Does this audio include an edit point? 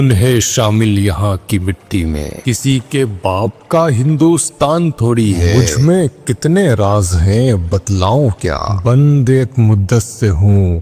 yes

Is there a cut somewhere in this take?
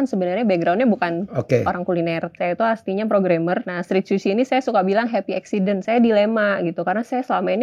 yes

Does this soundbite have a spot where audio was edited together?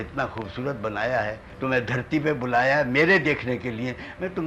yes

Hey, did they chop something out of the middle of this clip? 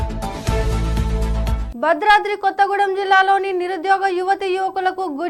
no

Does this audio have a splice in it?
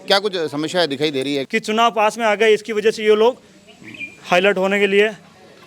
yes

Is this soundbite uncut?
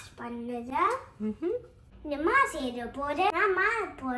no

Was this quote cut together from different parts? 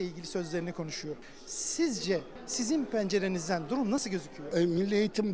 yes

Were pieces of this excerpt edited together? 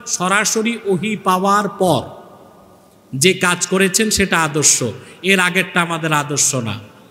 no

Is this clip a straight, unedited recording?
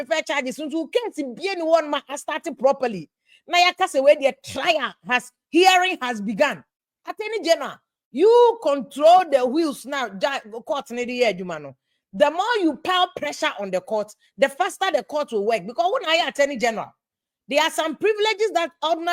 yes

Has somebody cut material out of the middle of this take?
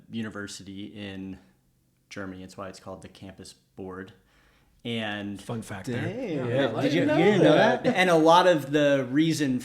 yes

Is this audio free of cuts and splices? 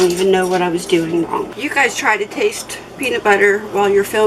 no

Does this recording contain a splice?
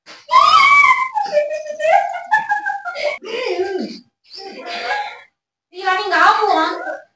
yes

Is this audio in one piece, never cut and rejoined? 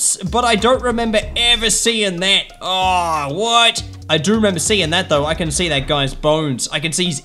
yes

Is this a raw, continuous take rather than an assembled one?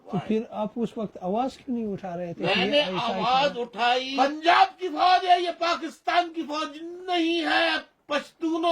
no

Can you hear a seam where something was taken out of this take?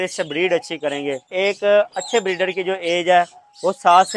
yes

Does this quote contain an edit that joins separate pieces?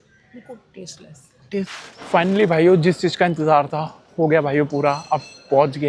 yes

